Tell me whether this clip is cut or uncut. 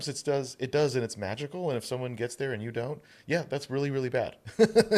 uncut